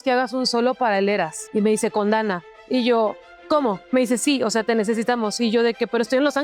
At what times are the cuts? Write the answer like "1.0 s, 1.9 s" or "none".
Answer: 1.4 s, 3.8 s